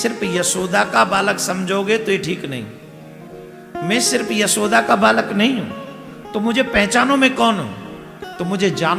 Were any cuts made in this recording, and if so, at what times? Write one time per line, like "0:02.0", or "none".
none